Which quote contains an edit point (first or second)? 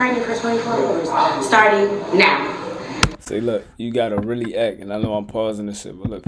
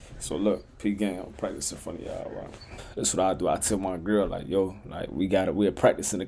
second